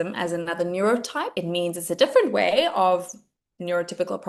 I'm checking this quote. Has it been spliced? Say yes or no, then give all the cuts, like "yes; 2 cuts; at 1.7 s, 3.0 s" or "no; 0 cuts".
yes; 1 cut; at 1.3 s